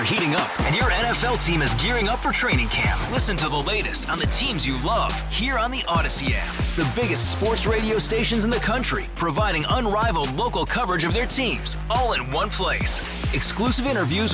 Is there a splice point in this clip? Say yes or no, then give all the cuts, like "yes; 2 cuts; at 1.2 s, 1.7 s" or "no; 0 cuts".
no; 0 cuts